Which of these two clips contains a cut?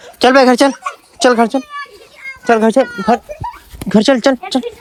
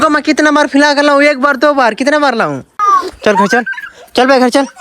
second; 1 cut; at 2.7 s

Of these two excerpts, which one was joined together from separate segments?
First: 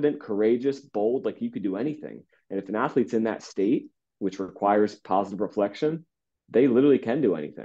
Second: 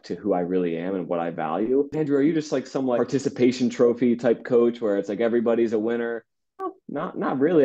second; 3 cuts; at 1.9 s, 3.0 s, 6.7 s

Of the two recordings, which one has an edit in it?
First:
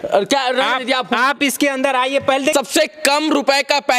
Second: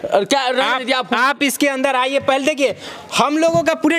first; 1 cut; at 2.5 s

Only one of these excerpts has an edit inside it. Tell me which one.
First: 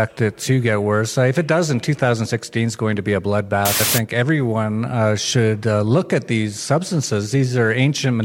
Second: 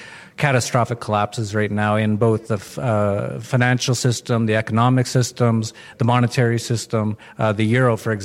first; 1 cut; at 3.9 s

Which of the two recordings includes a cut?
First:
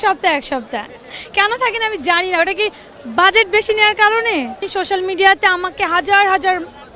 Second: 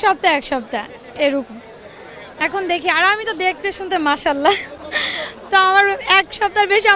first; 2 cuts; at 1.0 s, 4.6 s

